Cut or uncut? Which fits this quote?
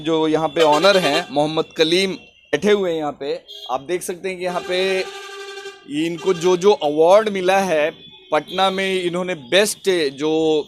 cut